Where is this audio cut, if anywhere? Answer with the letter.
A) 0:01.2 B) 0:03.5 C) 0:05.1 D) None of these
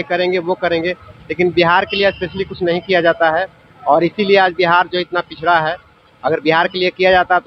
D